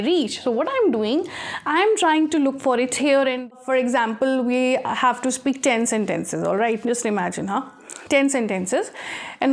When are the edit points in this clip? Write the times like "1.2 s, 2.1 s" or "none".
3.5 s